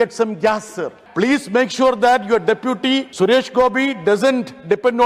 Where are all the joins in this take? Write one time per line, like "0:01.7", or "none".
0:00.9
0:03.1